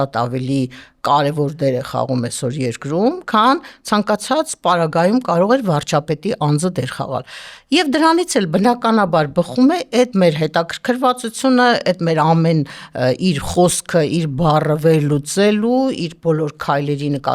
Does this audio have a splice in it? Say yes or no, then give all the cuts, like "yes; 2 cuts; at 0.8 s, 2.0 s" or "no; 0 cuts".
no; 0 cuts